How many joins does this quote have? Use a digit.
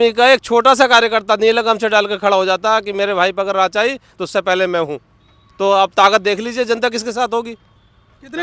0